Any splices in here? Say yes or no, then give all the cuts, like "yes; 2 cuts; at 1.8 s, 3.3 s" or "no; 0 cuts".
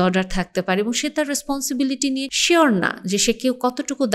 yes; 1 cut; at 2.3 s